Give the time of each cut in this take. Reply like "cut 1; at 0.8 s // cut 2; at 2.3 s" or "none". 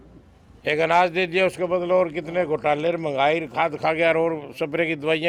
none